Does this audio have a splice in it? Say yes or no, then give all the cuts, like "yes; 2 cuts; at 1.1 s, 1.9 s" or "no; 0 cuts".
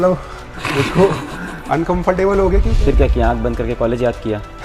yes; 1 cut; at 2.7 s